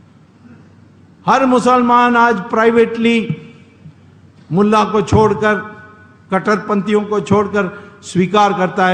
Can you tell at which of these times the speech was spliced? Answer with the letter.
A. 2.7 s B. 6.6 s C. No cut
C